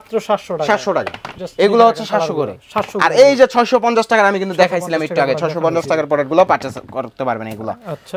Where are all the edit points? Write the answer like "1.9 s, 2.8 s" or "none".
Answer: none